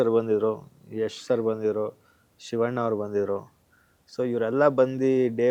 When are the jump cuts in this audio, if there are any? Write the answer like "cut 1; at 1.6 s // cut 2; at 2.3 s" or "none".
none